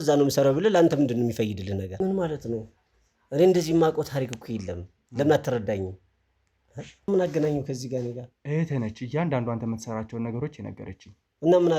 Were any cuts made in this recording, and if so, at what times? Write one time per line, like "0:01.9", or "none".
0:01.9
0:07.1